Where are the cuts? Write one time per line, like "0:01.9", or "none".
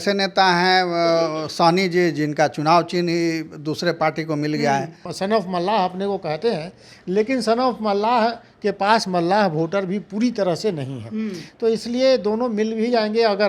0:05.1